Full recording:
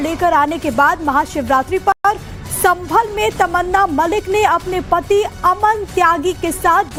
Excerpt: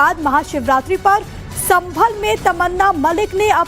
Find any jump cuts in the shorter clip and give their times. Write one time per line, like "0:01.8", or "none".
0:01.1